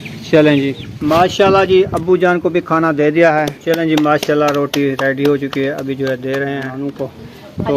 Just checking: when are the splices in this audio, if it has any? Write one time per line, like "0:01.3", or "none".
0:00.9
0:03.5
0:06.7